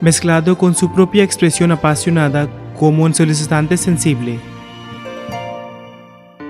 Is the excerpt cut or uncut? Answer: cut